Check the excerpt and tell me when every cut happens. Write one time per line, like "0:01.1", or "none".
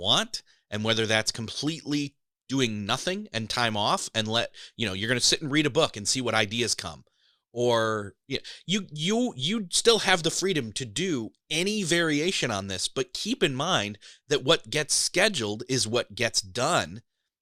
none

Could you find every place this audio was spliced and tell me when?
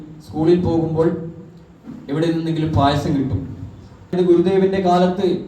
0:04.1

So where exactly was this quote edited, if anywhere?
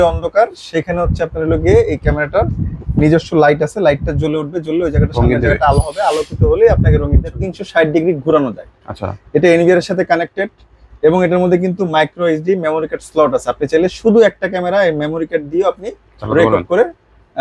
0:07.5

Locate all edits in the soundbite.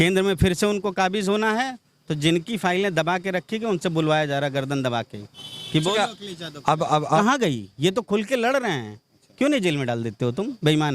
0:07.2

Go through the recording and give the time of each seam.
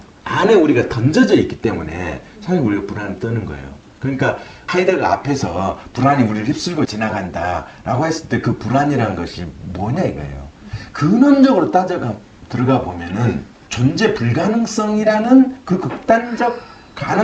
none

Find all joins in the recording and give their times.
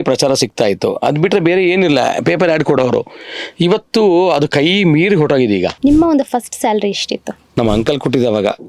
0:05.7
0:07.4

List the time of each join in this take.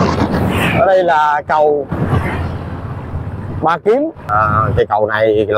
0:04.3

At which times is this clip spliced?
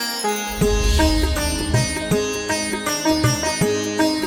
0:01.8

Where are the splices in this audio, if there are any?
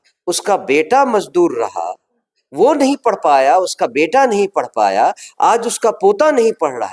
none

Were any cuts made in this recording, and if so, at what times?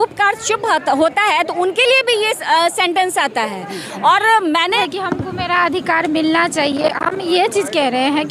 0:04.7

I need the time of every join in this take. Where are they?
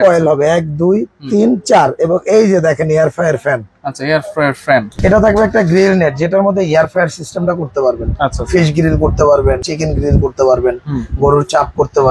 0:04.9
0:09.7

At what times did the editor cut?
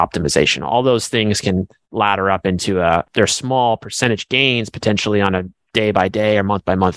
0:03.1

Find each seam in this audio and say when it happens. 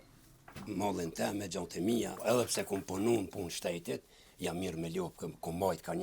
0:02.2

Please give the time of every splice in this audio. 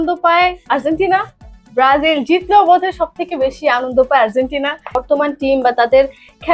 0:05.0

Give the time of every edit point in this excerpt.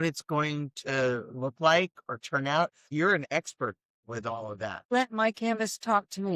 0:02.9
0:04.9

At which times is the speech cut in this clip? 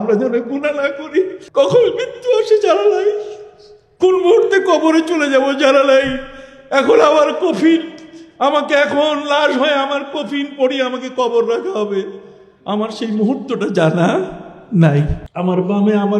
0:01.4
0:15.2

